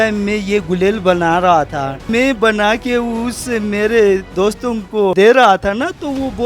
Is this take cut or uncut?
cut